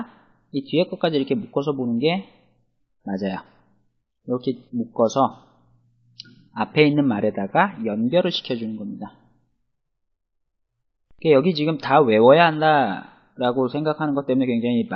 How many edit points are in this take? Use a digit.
0